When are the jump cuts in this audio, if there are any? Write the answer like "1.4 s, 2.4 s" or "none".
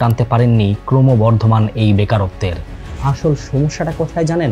2.9 s